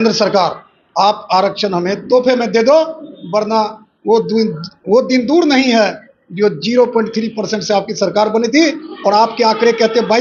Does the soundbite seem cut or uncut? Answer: uncut